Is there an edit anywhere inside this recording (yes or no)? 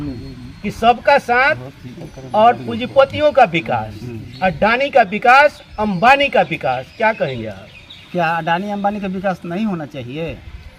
no